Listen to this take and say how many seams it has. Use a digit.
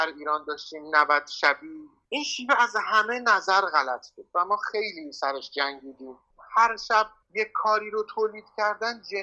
1